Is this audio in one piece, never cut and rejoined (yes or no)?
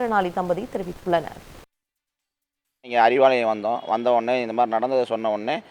yes